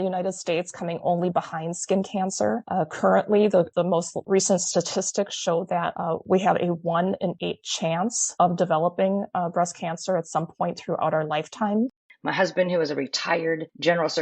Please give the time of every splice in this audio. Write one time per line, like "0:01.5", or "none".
0:11.9